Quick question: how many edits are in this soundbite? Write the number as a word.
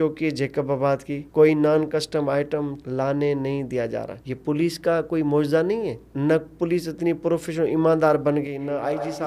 two